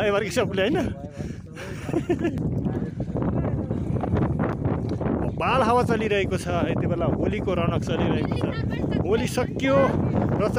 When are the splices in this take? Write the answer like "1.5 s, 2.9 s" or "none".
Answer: none

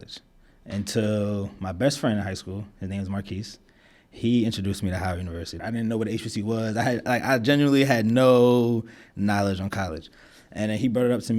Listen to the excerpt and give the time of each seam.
5.5 s

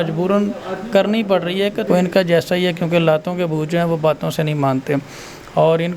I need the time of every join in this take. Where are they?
1.8 s

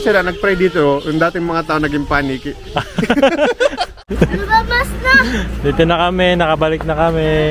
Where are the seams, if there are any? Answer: 4.0 s

